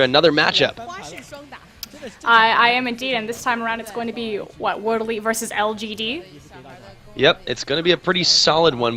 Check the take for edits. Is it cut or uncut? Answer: uncut